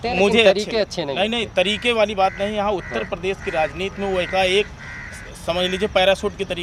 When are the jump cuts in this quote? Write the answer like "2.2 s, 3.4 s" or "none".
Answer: none